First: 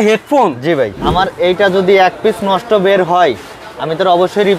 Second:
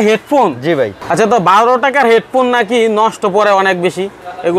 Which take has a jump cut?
first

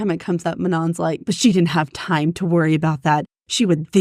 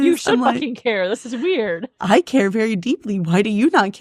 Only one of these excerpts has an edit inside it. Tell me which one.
first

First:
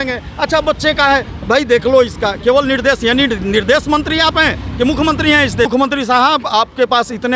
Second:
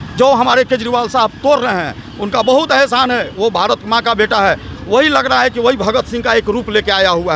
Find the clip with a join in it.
first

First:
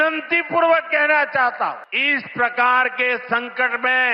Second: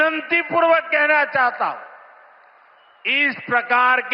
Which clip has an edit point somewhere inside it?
first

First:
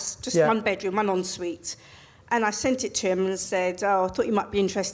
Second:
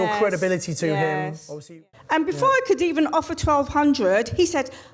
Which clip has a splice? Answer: second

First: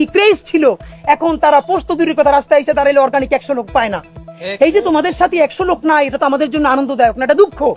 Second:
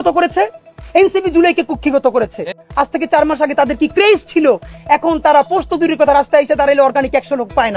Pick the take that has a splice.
second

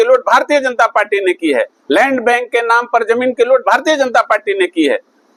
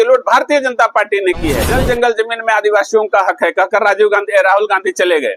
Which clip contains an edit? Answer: second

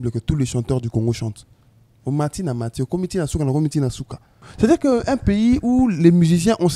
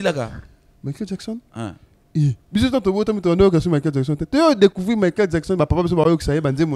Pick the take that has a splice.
first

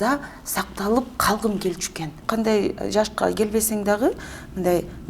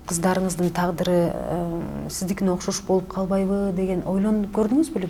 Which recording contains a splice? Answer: first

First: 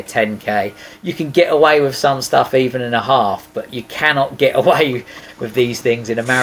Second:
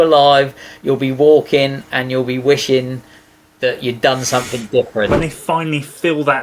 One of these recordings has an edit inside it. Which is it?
second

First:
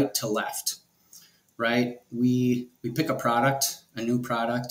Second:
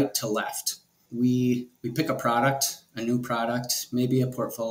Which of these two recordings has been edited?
second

